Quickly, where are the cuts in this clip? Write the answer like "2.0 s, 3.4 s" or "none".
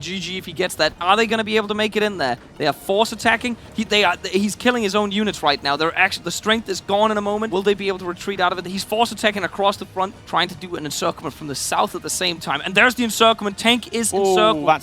1.0 s, 7.5 s, 10.2 s